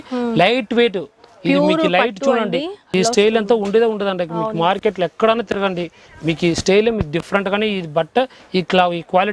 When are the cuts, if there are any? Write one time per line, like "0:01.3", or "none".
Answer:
0:02.9